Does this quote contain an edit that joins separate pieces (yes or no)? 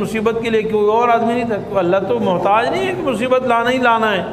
no